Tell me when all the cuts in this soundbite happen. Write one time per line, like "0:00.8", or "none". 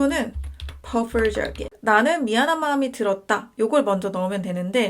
0:01.6